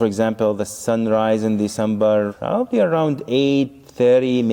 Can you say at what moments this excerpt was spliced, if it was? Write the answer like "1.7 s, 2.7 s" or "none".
none